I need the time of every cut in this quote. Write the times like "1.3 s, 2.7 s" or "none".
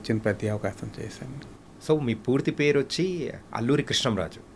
1.4 s